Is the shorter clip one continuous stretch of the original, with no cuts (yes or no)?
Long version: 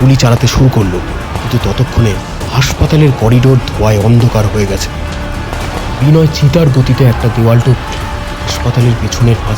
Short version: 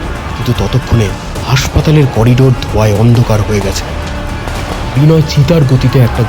yes